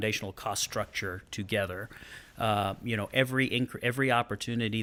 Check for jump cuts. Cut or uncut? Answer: uncut